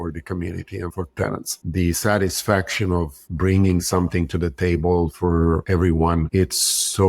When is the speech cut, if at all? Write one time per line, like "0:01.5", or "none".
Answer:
0:01.6